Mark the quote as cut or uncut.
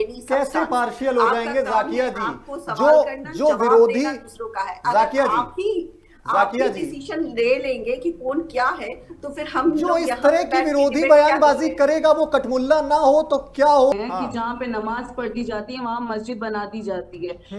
cut